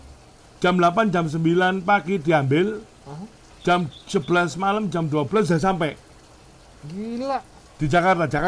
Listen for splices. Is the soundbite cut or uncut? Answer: uncut